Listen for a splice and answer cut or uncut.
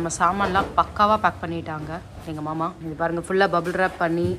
cut